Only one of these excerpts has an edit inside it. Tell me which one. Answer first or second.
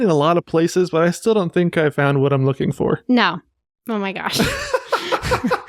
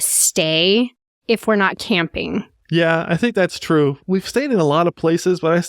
second